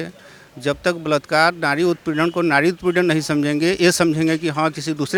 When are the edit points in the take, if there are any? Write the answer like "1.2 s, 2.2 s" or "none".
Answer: none

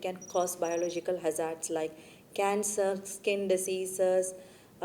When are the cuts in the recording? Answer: none

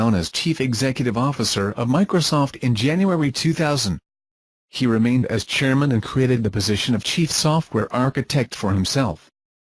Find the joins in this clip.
none

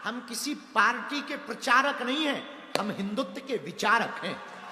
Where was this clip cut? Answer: none

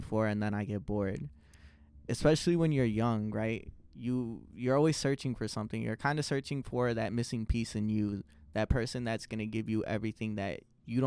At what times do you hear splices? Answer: none

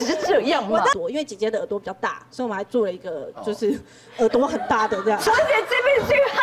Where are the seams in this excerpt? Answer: 0.9 s, 5.2 s

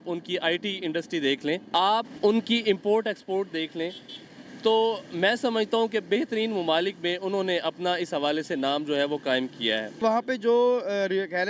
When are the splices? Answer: 1.6 s, 10.0 s

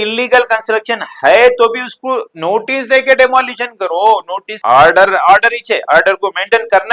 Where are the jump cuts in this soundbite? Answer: 4.5 s

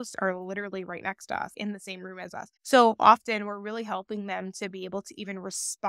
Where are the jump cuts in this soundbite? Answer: none

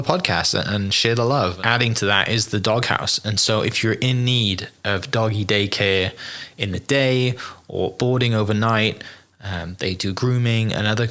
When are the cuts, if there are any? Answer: 1.6 s

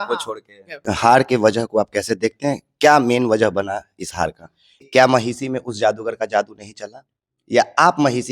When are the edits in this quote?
0.8 s, 4.8 s

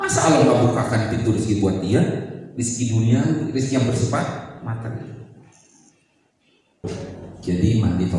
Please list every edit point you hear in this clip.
6.8 s

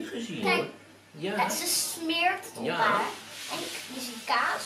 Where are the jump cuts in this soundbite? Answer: none

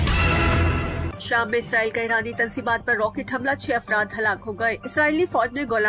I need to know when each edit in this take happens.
none

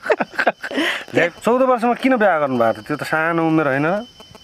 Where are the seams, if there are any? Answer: 1.3 s

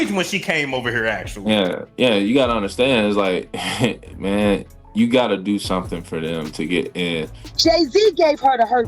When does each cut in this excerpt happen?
7.4 s

